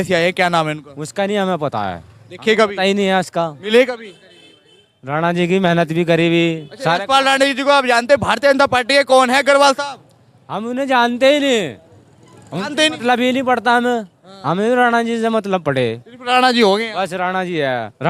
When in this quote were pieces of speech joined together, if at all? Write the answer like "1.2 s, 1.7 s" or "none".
none